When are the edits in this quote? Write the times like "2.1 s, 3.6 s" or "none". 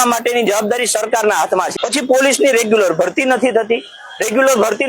1.7 s